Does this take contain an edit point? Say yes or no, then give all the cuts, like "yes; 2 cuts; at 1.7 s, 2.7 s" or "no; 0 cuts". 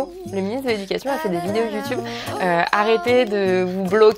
yes; 1 cut; at 2.2 s